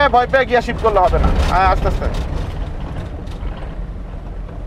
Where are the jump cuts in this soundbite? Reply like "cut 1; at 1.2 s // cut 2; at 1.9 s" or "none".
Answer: none